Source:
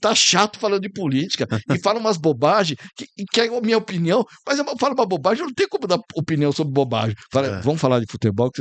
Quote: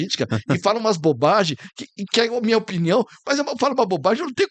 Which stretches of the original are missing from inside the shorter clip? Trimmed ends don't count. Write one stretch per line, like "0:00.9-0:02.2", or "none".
none

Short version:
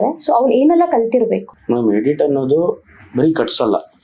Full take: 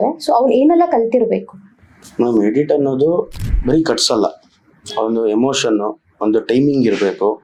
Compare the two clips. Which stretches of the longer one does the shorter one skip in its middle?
0:01.5-0:02.0

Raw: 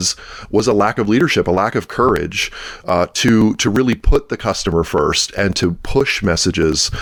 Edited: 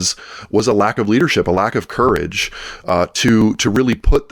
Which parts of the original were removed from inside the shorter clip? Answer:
none

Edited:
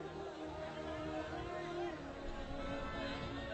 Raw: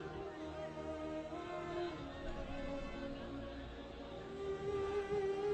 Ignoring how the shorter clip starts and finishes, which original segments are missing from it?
none

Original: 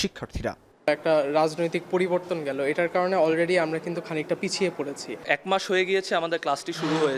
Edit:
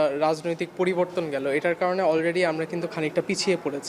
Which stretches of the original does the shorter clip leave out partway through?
none

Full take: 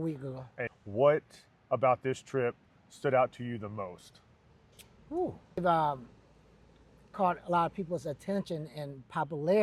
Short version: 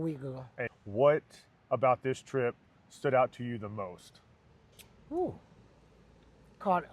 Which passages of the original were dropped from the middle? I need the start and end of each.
0:05.5-0:06.0

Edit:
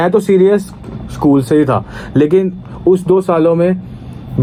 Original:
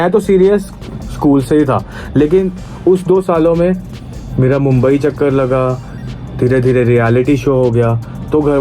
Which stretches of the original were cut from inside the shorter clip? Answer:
none

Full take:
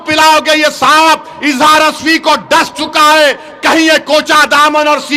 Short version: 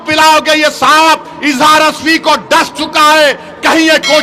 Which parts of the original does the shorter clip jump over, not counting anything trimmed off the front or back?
none

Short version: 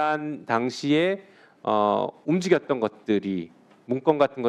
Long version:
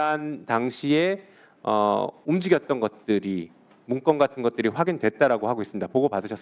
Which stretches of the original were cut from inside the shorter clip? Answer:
none

